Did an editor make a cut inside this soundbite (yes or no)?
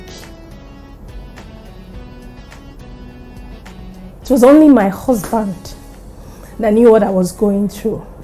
no